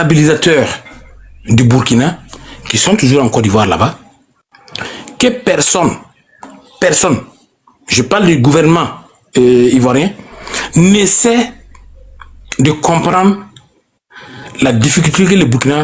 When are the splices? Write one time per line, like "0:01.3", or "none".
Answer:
none